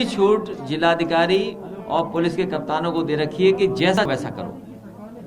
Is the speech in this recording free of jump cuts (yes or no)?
no